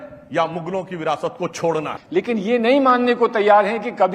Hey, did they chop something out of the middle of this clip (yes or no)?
yes